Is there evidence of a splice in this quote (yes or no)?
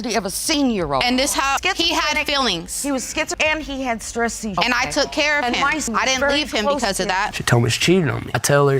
yes